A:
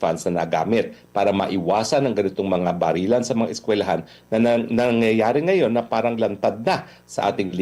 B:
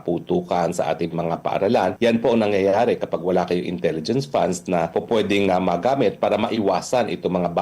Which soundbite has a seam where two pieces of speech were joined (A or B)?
B